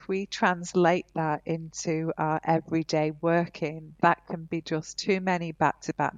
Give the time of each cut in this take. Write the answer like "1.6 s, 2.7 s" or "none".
3.9 s